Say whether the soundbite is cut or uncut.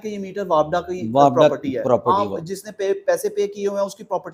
uncut